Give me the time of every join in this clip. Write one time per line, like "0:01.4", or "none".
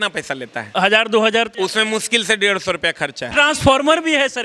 0:00.7
0:01.5
0:03.3